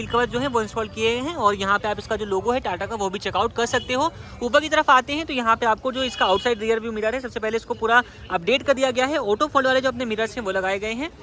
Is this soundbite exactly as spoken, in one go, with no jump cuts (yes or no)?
yes